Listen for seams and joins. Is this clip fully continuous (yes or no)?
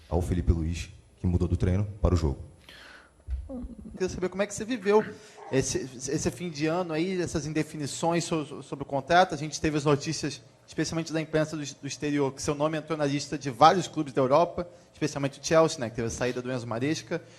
no